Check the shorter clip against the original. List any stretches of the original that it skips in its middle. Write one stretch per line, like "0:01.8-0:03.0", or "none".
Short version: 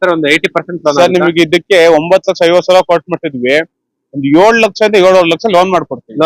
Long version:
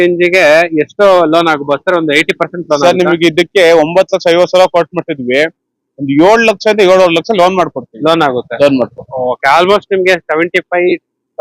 none